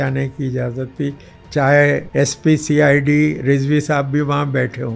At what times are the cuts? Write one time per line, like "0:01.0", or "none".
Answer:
0:02.1

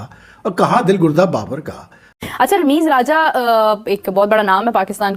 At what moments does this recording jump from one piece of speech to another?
0:02.0

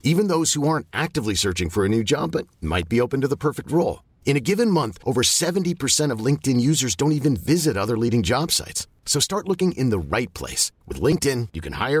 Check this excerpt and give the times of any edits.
none

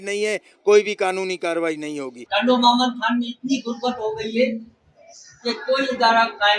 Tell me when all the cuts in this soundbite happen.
0:02.1

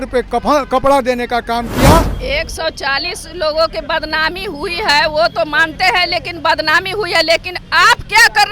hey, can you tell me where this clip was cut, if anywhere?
0:02.1

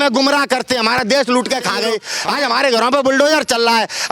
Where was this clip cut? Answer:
0:02.1

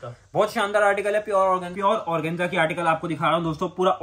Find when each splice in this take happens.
0:01.7

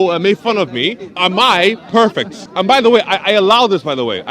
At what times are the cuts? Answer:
0:01.2
0:02.4

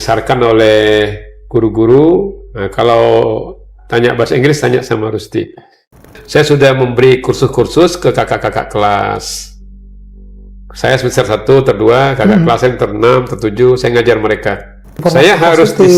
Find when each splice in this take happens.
0:06.2
0:15.0

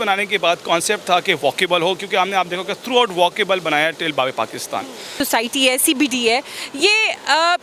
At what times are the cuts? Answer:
0:05.2

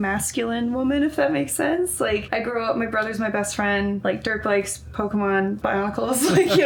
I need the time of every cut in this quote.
0:02.3
0:04.0
0:05.6

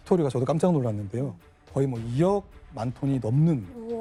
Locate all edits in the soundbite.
none

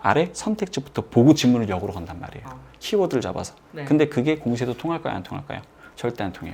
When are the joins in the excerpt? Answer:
none

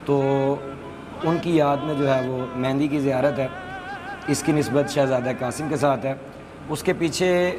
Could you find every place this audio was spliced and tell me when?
none

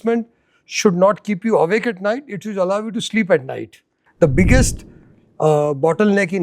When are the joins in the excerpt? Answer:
0:04.0

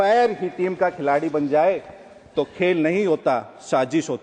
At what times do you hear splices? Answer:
none

